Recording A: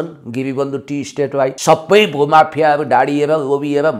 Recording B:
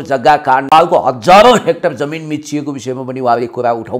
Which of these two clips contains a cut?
A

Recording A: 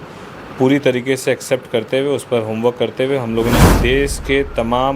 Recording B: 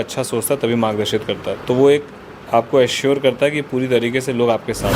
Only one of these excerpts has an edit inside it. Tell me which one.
A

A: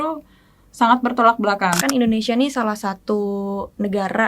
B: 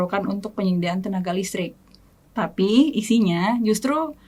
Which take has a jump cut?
A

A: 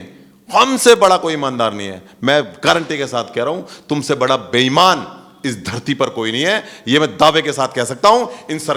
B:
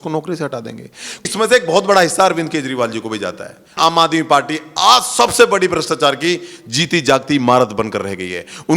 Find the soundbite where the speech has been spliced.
B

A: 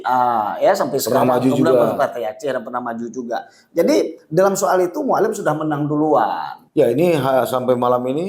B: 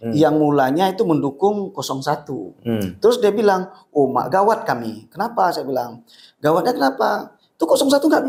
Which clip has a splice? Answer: A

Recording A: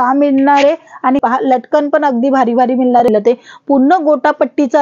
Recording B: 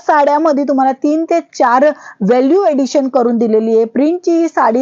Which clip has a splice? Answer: A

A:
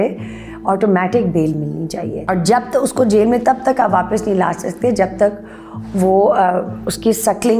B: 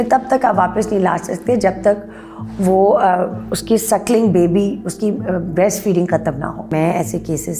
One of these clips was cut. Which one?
B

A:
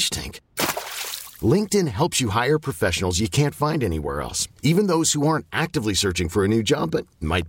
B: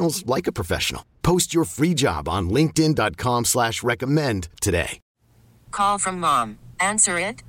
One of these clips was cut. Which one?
B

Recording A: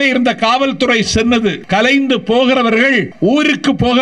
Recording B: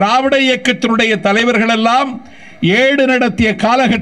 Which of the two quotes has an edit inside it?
A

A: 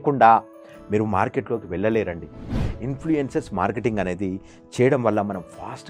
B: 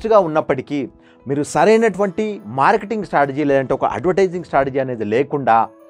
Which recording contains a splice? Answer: A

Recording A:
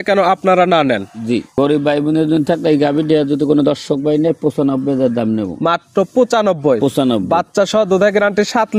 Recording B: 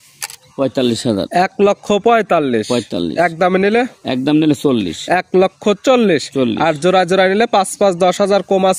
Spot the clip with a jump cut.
A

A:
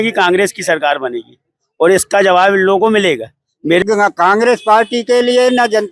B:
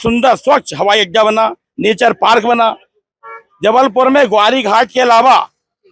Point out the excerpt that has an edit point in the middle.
A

